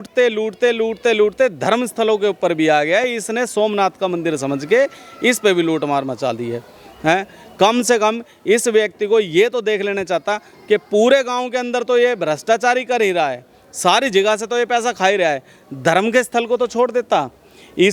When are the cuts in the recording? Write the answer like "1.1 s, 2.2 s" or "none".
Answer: none